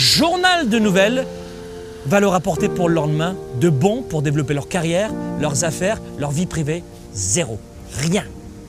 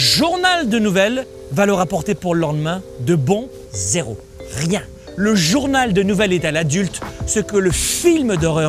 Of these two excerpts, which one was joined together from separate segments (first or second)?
second